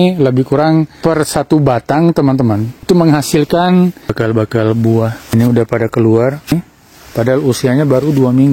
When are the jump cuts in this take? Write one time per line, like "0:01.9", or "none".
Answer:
0:00.9
0:02.7
0:04.1
0:05.3
0:06.5

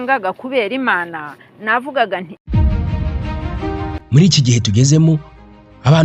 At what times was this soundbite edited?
0:02.3

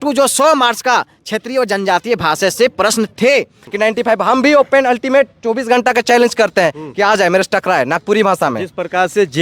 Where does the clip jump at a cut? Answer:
0:03.6

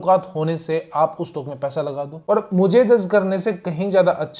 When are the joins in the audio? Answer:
0:02.2

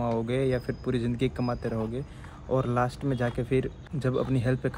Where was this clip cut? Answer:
0:03.8

